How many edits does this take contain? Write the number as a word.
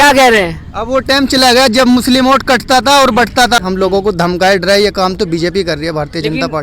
one